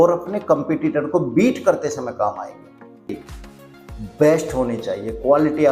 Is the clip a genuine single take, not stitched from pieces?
no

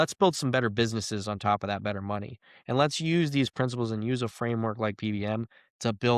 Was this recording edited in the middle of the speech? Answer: no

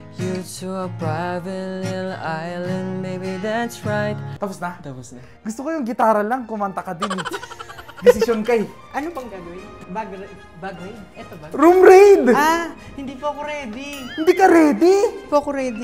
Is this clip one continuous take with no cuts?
no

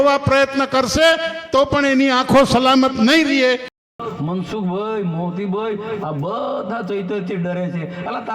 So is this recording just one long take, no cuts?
no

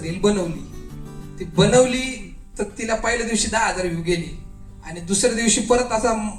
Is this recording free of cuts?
yes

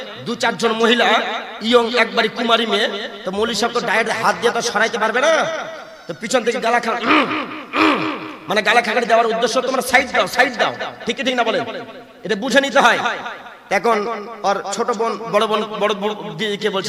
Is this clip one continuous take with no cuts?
yes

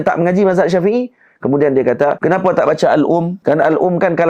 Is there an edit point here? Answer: yes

